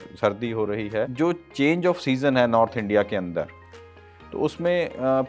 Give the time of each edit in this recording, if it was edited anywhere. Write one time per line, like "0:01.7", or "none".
0:01.1